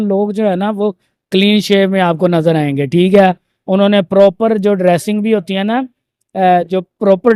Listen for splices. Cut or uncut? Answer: uncut